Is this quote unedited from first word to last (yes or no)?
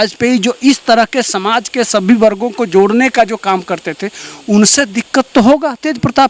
yes